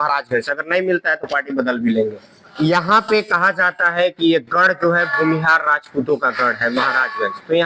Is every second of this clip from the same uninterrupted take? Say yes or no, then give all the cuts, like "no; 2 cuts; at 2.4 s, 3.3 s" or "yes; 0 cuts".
no; 1 cut; at 2.5 s